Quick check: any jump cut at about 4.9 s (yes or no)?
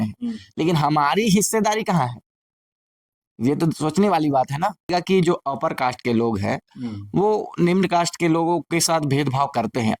yes